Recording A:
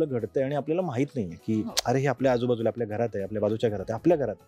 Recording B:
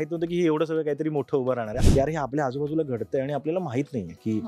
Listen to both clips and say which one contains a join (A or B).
B